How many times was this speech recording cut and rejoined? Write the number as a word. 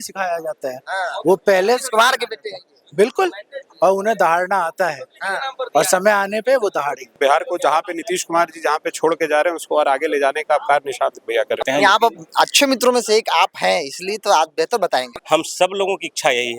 three